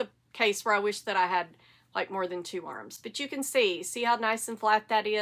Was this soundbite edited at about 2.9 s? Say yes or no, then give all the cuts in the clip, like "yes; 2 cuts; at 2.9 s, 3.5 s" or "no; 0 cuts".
no; 0 cuts